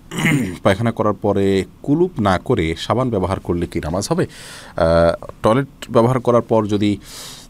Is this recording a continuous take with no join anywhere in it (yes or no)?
yes